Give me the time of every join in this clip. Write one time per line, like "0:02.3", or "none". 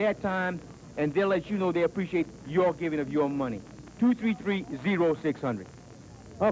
0:05.2